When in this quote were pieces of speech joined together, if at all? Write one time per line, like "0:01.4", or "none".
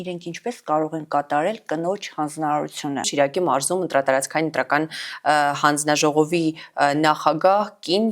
0:03.1